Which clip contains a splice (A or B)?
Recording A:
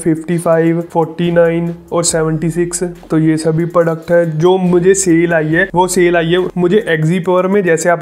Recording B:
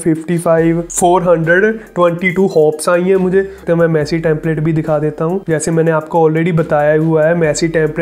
B